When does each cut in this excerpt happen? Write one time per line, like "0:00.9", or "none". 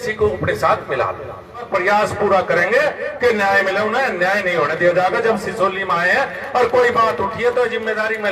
0:01.7